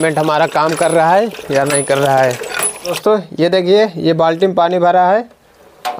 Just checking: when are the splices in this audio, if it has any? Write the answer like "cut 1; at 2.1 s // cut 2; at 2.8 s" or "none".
cut 1; at 3.0 s